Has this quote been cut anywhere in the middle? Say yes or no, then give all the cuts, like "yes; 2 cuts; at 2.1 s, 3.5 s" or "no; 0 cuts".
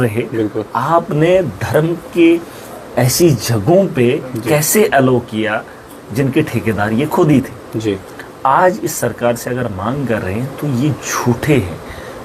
no; 0 cuts